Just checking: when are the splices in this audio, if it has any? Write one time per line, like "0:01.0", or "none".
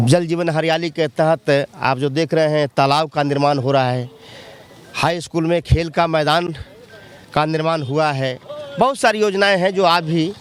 none